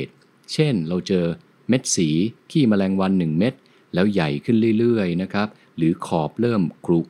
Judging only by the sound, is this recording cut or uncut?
cut